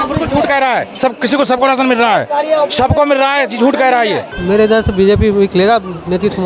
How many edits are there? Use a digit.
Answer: 1